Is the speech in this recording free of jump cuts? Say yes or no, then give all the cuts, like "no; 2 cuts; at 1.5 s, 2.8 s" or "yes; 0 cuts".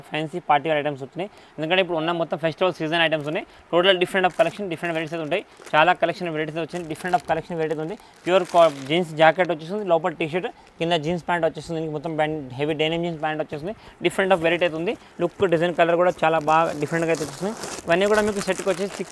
yes; 0 cuts